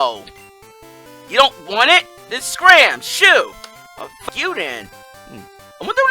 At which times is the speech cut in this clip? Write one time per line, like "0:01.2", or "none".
0:04.2